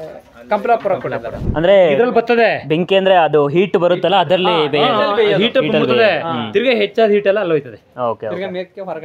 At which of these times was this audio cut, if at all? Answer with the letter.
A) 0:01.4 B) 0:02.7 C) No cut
A